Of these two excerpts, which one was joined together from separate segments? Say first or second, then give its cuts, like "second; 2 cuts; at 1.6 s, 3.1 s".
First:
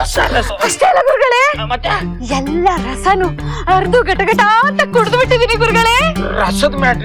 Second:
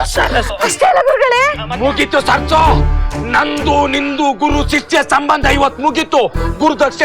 second; 1 cut; at 1.6 s